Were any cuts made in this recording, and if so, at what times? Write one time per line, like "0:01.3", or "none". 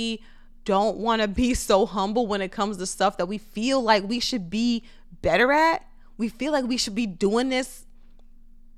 none

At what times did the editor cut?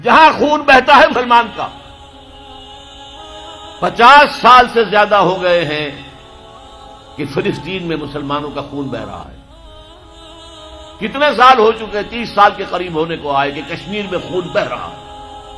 0:01.1

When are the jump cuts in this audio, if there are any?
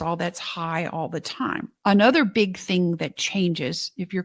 0:01.7

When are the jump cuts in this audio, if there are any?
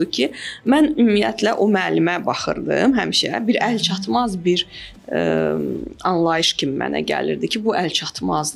none

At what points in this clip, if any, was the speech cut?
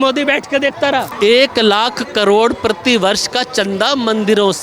0:01.1

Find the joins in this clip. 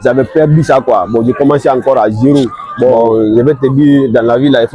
0:02.9

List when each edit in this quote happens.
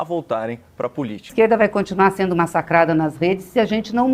0:01.3

